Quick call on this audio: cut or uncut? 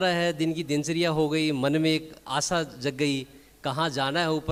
uncut